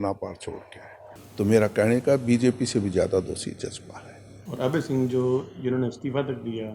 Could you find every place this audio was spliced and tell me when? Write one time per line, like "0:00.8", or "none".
0:01.2